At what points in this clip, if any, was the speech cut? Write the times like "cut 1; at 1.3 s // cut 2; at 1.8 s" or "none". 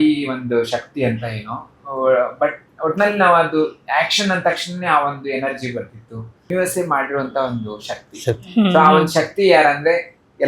cut 1; at 6.5 s